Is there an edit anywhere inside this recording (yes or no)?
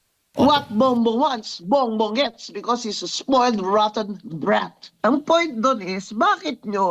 yes